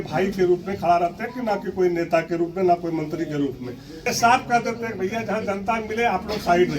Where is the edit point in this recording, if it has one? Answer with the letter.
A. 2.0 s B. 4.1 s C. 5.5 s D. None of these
B